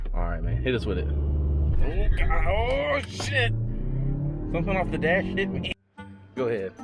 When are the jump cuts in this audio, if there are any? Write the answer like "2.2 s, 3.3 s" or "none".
5.8 s